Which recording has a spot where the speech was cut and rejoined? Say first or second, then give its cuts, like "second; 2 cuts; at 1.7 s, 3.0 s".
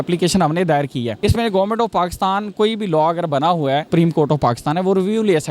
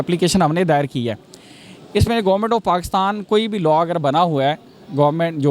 first; 2 cuts; at 1.1 s, 3.9 s